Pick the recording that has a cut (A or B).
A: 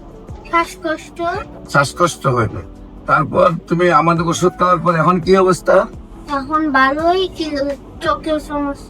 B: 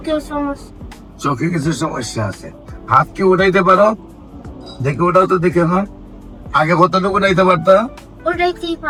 A